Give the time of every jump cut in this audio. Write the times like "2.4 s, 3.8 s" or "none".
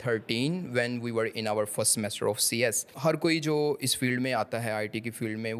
2.9 s